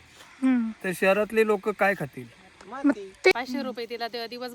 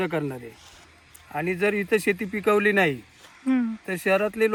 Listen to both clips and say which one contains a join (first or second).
first